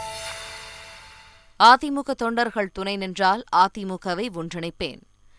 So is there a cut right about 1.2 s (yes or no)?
yes